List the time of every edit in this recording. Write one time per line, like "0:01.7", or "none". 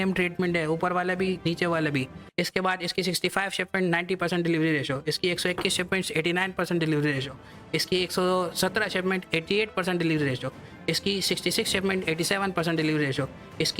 0:02.2

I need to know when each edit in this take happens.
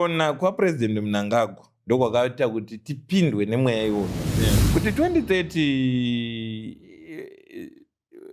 0:04.3

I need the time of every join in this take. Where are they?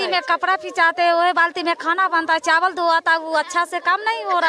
none

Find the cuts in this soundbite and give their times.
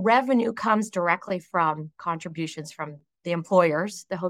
none

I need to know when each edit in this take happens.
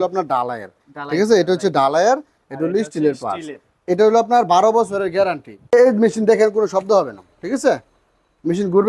0:05.7

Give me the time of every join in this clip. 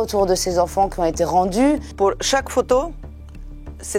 0:01.9

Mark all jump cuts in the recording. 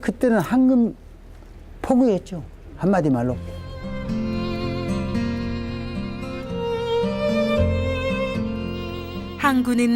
0:05.5

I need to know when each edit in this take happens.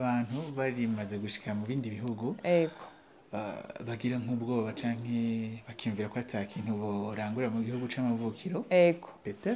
none

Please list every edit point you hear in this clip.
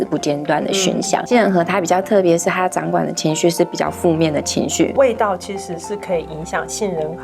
0:01.2
0:04.9

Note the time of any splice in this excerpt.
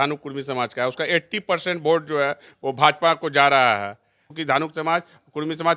0:04.3

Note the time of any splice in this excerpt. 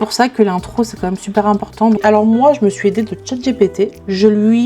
0:02.0

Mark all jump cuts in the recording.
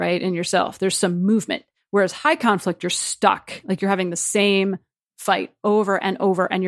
none

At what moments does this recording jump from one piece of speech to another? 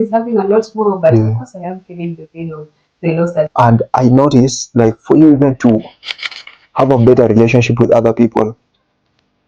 0:03.5

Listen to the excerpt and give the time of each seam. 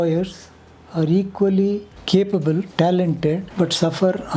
0:01.9
0:02.7
0:03.5

